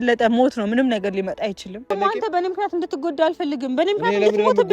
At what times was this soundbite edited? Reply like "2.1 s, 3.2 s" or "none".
1.9 s